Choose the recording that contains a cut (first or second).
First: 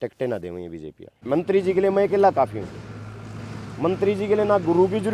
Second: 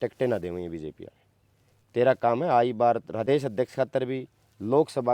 first